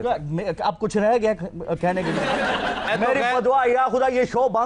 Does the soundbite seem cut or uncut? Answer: cut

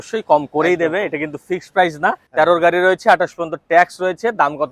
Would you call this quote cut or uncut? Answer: cut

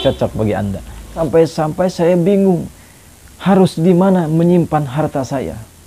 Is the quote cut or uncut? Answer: cut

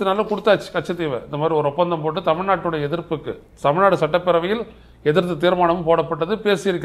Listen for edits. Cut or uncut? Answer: uncut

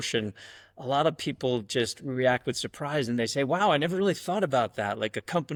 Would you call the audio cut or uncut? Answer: uncut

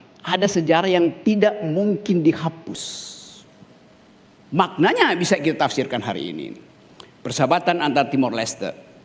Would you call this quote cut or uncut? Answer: cut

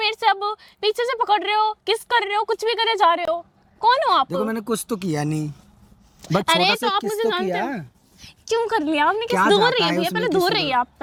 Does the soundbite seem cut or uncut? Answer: uncut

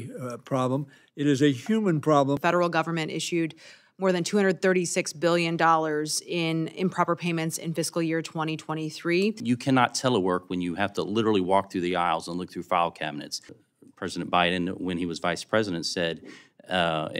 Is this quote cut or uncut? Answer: cut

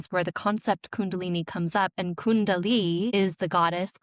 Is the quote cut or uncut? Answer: cut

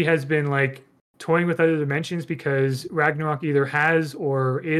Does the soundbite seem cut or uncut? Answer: uncut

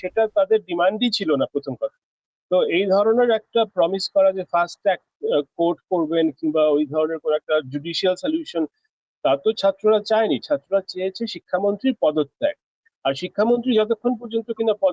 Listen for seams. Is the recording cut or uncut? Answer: uncut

